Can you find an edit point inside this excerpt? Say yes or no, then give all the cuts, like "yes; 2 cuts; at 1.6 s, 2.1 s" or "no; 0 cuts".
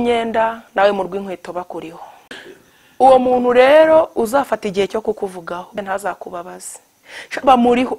yes; 2 cuts; at 2.4 s, 5.7 s